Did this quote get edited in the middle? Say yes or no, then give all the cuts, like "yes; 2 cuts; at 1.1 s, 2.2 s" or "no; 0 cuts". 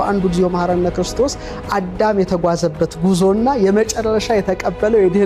no; 0 cuts